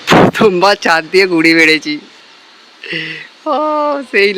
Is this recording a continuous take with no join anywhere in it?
yes; 0 cuts

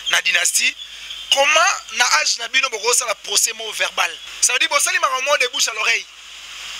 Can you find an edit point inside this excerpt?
yes; 1 cut; at 4.3 s

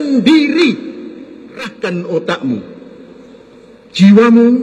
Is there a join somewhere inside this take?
yes; 1 cut; at 1.7 s

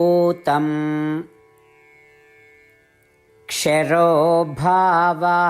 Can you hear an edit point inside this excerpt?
yes; 2 cuts; at 1.8 s, 3.5 s

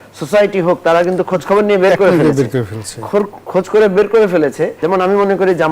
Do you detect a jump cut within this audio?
yes; 1 cut; at 4.8 s

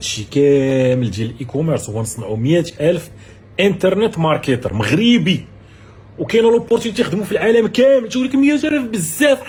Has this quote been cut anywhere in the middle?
no; 0 cuts

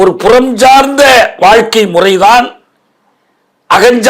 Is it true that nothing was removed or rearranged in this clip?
yes; 0 cuts

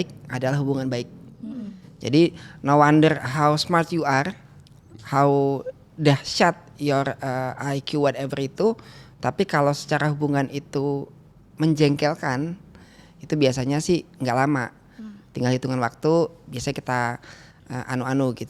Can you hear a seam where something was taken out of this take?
no; 0 cuts

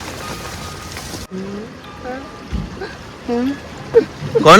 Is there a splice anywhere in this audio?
yes; 1 cut; at 1.2 s

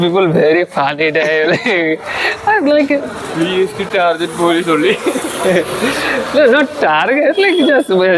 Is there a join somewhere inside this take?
no; 0 cuts

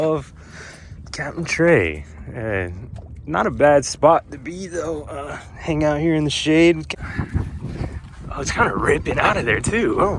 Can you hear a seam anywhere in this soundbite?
yes; 1 cut; at 6.8 s

